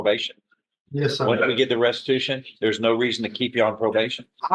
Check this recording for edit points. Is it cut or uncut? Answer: uncut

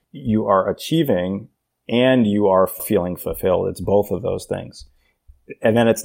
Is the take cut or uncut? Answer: uncut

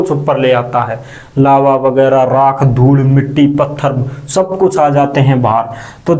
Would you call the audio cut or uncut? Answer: uncut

